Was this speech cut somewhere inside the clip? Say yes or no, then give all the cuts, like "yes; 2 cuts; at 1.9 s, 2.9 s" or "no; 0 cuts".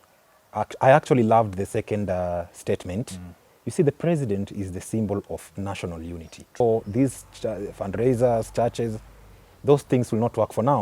yes; 1 cut; at 6.6 s